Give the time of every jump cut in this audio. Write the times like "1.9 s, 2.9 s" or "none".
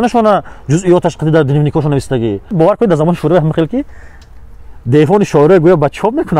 2.5 s